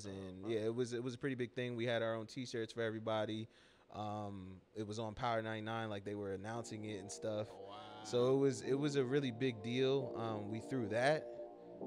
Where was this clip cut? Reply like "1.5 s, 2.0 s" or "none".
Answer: none